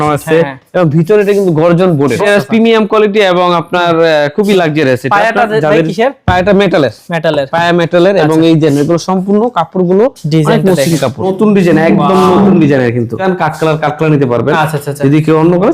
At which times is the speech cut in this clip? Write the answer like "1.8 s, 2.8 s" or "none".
2.2 s, 11.3 s, 13.2 s